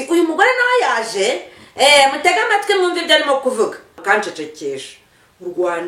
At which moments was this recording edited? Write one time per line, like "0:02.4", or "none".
0:04.0